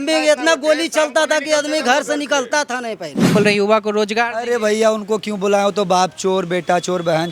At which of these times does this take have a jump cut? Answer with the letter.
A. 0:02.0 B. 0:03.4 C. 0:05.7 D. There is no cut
B